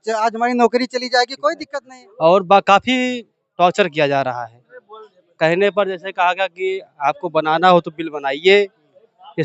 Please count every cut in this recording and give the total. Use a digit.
1